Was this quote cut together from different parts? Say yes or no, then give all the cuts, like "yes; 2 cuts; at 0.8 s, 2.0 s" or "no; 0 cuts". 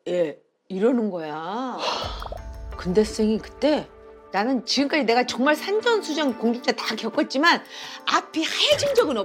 no; 0 cuts